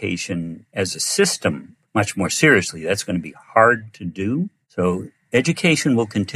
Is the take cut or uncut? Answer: cut